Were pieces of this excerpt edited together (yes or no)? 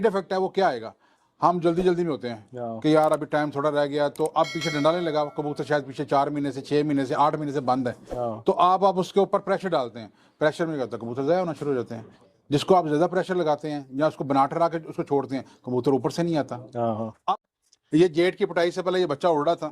yes